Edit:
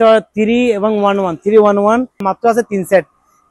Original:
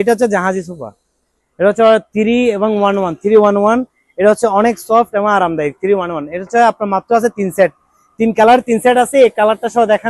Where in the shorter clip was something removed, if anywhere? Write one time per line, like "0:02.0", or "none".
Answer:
0:02.2